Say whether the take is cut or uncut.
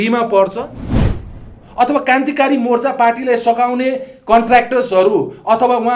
cut